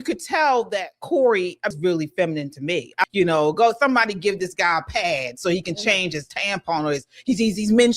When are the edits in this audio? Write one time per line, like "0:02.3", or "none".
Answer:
0:01.8
0:03.1